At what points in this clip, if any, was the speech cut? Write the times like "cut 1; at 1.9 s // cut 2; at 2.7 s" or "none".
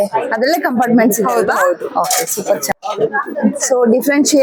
cut 1; at 2.7 s